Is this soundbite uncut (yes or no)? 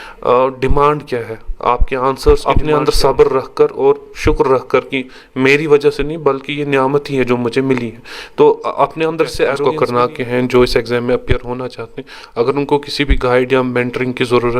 no